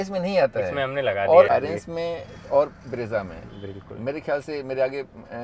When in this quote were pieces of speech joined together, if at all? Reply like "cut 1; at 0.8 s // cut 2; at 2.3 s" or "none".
cut 1; at 1.5 s